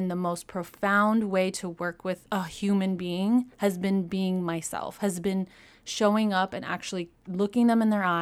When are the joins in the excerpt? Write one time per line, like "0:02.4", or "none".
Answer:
0:02.2